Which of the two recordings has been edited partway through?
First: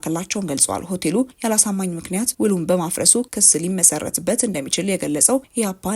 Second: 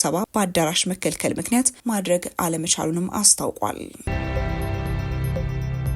second; 1 cut; at 3.9 s

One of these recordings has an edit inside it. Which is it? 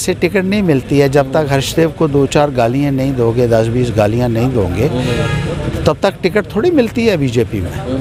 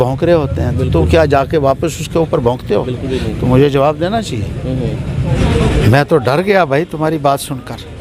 second; 1 cut; at 5.4 s

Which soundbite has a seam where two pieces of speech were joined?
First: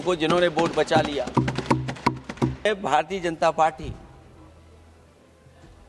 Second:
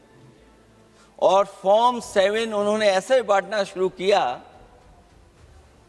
first; 1 cut; at 2.7 s

